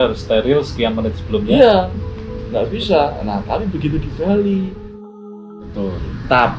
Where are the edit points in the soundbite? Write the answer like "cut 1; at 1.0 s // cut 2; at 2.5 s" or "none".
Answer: cut 1; at 5.1 s